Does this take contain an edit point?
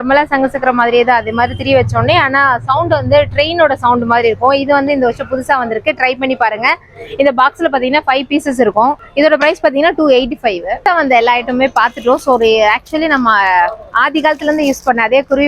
no; 0 cuts

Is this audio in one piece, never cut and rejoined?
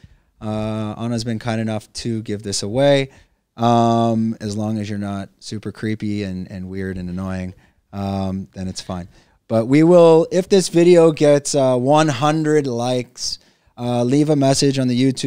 yes; 0 cuts

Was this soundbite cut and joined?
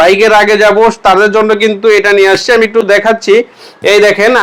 no; 0 cuts

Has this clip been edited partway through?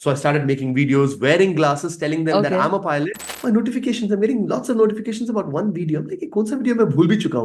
yes; 1 cut; at 3.3 s

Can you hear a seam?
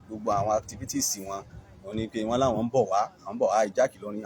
no; 0 cuts

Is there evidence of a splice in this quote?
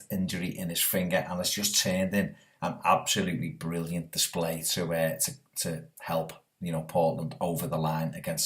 yes; 1 cut; at 5.3 s

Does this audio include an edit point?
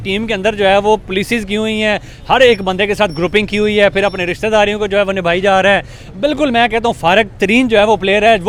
no; 0 cuts

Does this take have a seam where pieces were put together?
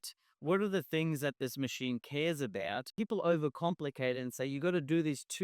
yes; 1 cut; at 2.9 s

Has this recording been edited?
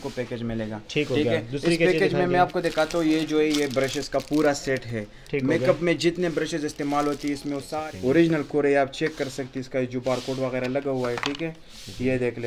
yes; 1 cut; at 7.7 s

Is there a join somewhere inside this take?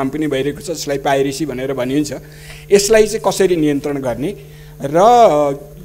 no; 0 cuts

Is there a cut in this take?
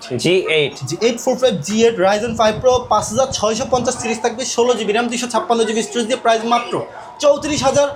no; 0 cuts

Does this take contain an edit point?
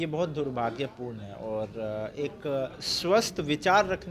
no; 0 cuts

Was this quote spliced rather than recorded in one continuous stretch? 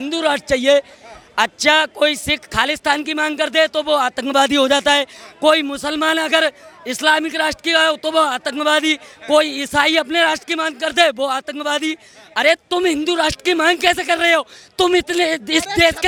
no; 0 cuts

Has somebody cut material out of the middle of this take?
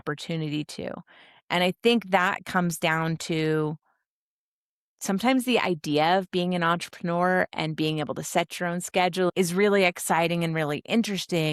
yes; 1 cut; at 9.3 s

